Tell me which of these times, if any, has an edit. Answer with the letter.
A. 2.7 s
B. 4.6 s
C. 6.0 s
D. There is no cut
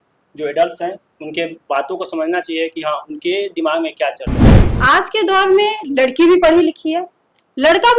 B